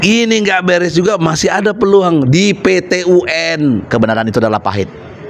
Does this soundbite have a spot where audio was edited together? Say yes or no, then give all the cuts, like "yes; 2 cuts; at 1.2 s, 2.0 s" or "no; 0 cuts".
yes; 1 cut; at 3.8 s